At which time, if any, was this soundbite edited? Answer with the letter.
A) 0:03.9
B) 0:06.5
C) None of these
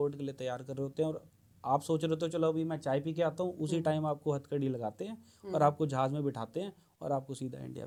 C